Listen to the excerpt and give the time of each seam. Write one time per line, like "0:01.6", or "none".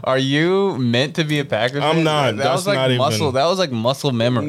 none